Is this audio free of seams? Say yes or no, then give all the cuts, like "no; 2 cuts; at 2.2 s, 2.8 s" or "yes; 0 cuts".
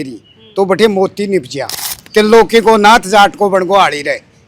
no; 1 cut; at 1.9 s